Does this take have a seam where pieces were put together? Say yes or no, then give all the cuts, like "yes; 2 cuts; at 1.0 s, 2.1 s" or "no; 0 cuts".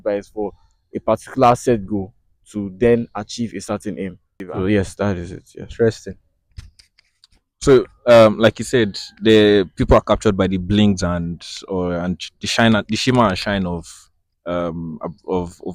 no; 0 cuts